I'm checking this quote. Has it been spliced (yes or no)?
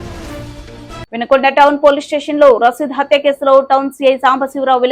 yes